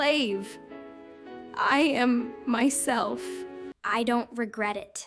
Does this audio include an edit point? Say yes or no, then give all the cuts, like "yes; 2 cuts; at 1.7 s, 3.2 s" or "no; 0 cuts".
yes; 1 cut; at 3.6 s